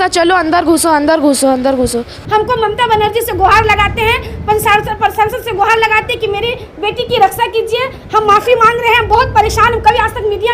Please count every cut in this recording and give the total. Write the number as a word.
one